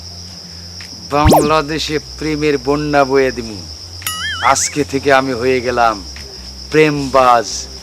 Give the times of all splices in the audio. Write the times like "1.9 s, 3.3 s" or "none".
none